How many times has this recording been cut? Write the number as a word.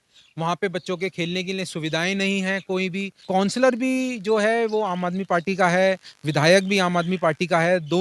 one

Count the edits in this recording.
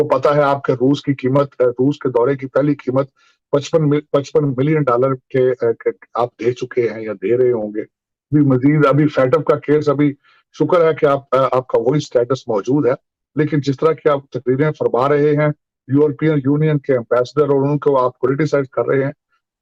zero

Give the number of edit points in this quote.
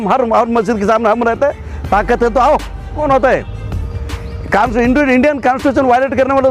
one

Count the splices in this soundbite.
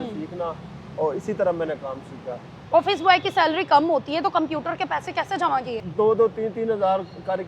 two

